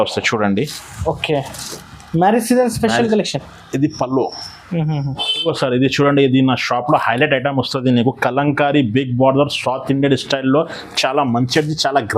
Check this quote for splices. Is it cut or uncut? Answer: cut